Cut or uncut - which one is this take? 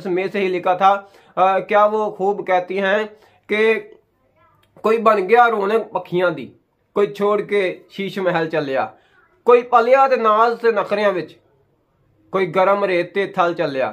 uncut